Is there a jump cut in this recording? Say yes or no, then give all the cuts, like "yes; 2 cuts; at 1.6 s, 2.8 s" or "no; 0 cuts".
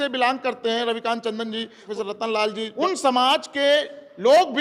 yes; 2 cuts; at 1.8 s, 2.7 s